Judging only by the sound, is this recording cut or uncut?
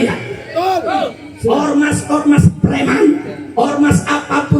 cut